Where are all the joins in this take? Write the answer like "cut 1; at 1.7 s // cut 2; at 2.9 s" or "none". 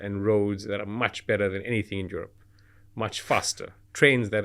none